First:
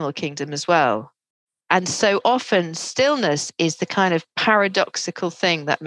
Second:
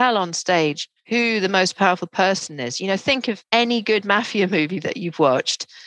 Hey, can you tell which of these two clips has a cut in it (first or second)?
second